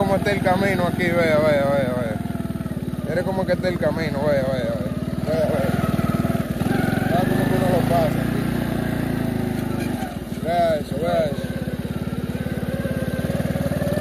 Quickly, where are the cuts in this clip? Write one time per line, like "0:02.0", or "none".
none